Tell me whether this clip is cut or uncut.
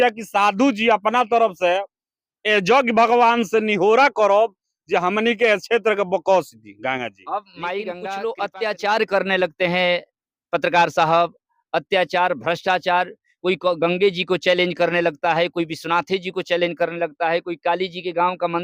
cut